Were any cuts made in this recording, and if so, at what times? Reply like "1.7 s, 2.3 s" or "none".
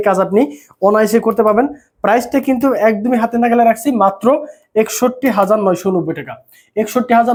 none

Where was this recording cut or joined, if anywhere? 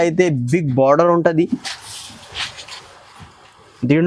none

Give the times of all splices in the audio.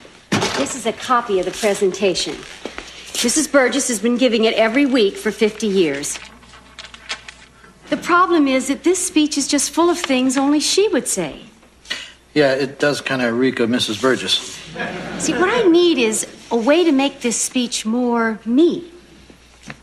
8.4 s

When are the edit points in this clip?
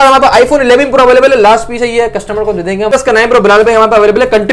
2.9 s

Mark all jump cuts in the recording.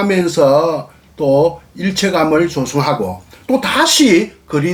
none

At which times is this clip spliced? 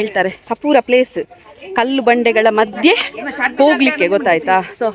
none

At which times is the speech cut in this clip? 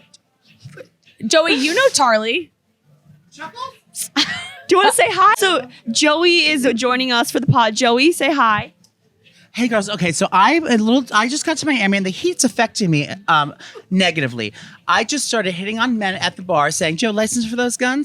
5.3 s

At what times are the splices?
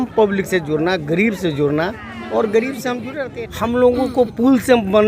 3.2 s

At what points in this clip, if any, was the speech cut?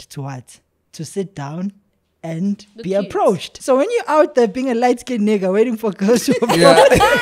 3.5 s

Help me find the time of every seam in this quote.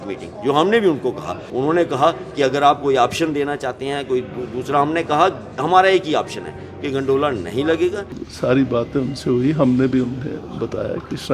1.4 s, 8.2 s

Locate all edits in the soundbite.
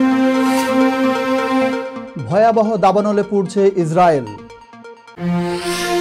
2.0 s

